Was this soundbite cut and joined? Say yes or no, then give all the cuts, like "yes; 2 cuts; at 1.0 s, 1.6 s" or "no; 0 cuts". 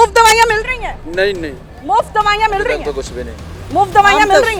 no; 0 cuts